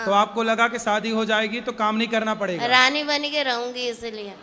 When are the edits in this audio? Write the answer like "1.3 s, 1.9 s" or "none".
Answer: none